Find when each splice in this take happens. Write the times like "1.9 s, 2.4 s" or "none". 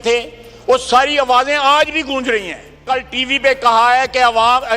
2.8 s